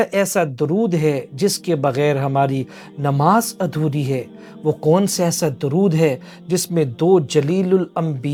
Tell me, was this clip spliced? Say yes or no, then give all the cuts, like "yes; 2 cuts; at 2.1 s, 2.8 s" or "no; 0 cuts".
no; 0 cuts